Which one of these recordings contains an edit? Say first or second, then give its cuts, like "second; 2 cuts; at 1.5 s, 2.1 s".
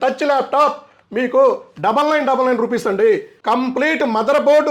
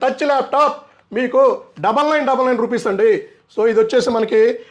first; 1 cut; at 3.3 s